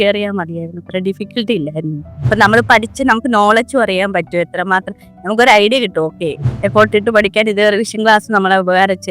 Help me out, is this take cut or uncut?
cut